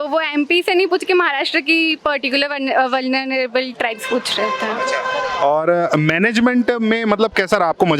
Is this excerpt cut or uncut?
uncut